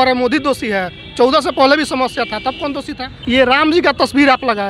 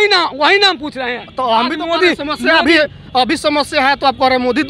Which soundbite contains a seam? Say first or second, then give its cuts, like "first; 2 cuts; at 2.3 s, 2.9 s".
first; 1 cut; at 3.1 s